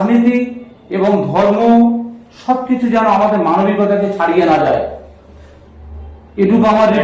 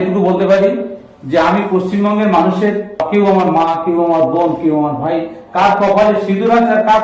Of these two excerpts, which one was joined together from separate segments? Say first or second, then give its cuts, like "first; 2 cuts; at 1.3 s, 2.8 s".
second; 1 cut; at 3.0 s